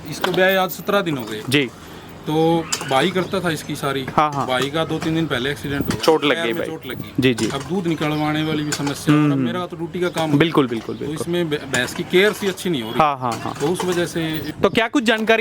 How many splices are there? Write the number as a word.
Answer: one